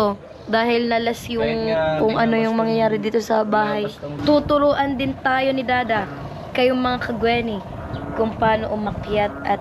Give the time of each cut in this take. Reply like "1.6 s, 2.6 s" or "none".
4.1 s